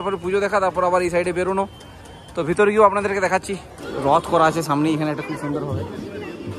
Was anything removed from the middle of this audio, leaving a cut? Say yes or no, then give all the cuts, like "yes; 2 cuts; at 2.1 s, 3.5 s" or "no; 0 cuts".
yes; 1 cut; at 3.7 s